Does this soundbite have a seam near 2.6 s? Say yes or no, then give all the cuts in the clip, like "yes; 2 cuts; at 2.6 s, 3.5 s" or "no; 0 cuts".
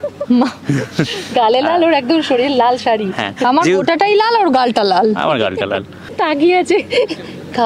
no; 1 cut; at 6.1 s